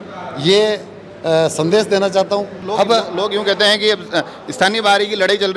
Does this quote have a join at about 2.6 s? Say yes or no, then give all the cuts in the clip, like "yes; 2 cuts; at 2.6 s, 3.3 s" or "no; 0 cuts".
yes; 1 cut; at 2.6 s